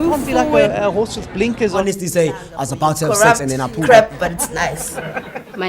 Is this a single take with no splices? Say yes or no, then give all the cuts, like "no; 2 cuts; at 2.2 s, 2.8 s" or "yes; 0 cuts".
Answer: no; 1 cut; at 3.4 s